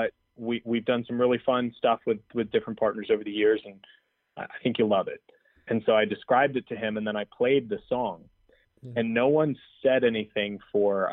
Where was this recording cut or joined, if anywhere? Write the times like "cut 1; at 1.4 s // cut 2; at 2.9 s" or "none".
none